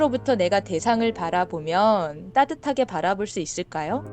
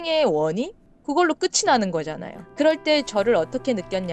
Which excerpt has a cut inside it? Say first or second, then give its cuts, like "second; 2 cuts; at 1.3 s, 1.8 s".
first; 1 cut; at 2.2 s